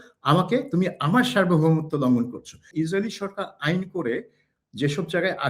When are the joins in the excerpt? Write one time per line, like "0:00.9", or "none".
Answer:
0:02.7